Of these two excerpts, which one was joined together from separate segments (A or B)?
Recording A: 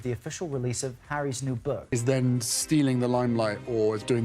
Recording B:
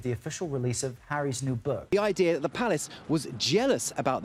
A